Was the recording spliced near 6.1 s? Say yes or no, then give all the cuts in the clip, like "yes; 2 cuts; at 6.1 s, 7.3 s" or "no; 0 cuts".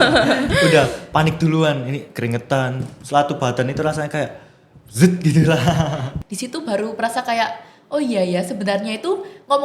yes; 1 cut; at 6.1 s